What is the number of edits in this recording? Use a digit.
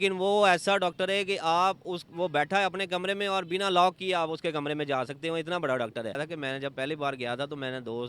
1